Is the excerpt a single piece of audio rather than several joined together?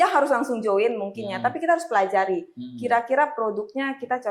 yes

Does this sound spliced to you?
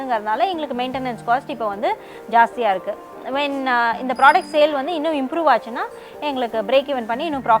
no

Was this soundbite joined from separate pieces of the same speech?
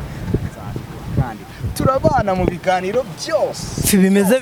no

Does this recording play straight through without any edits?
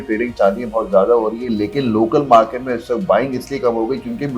yes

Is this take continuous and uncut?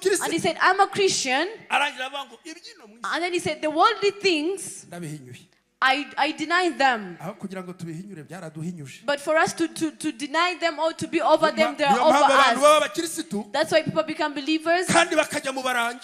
yes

